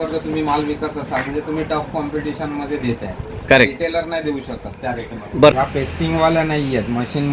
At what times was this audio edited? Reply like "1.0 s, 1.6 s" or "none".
5.5 s

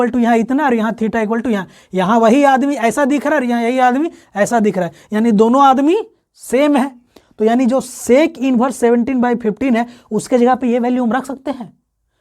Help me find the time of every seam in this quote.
none

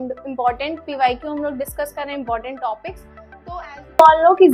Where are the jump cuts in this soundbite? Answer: none

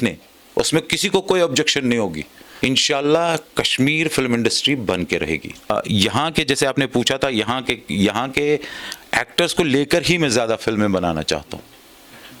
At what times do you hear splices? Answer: 2.4 s, 5.7 s

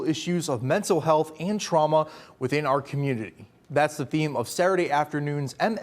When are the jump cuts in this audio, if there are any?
none

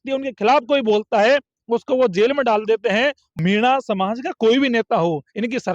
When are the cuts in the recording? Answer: 3.3 s

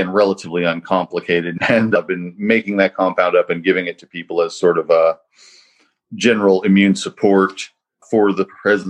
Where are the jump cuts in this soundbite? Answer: 1.5 s

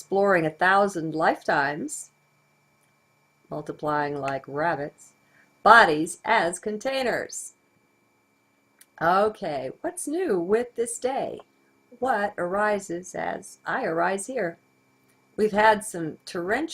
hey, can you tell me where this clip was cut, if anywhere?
none

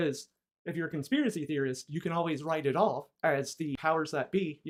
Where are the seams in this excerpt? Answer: none

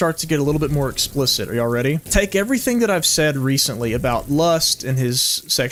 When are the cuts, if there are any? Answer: none

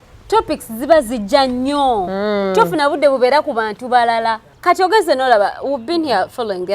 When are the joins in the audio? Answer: 4.5 s

